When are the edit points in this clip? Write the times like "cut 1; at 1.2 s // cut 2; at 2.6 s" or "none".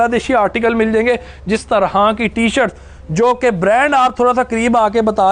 cut 1; at 1.6 s